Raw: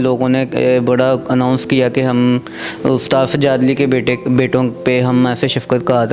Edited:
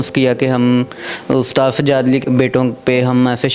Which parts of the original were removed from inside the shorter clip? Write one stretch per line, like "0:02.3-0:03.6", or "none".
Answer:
0:03.8-0:04.2